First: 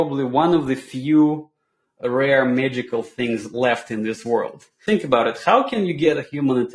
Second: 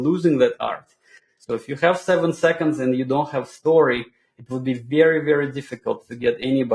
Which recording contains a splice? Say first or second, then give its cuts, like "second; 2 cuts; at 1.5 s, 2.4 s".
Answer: first; 2 cuts; at 4.8 s, 6.1 s